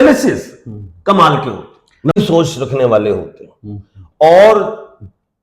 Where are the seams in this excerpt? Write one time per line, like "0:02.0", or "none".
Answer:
0:02.1